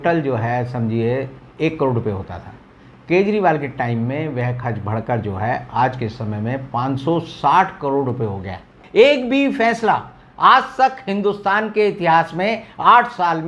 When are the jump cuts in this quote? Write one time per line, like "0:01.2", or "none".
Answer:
0:08.8